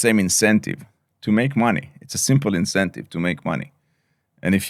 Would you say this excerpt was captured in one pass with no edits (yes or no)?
yes